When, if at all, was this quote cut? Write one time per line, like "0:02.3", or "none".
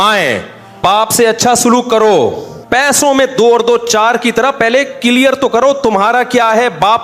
0:00.8
0:02.5